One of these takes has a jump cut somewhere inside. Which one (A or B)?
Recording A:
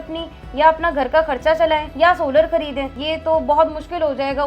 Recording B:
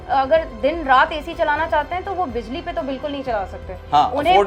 A